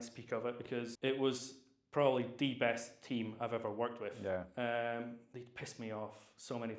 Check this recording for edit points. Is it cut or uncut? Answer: cut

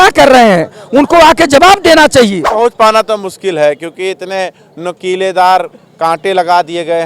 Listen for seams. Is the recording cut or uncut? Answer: cut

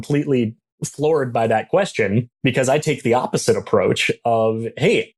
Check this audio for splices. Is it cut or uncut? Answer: cut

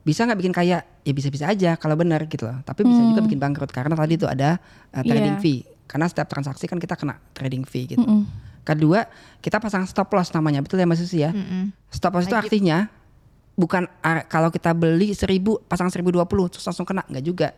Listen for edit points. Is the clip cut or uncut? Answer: uncut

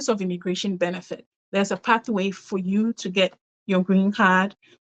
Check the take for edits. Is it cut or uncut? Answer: uncut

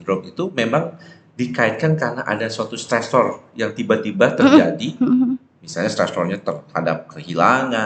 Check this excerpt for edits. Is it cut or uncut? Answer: uncut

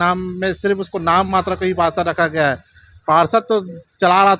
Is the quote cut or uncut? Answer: uncut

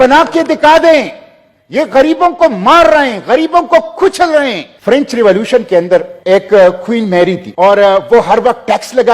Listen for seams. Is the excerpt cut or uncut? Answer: cut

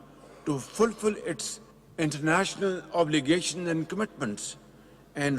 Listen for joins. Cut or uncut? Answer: uncut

